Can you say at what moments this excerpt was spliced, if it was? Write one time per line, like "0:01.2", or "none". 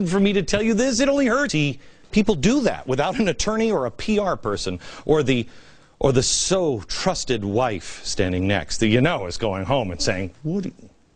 none